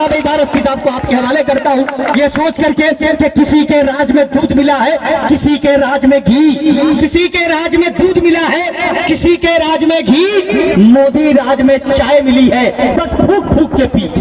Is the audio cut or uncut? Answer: uncut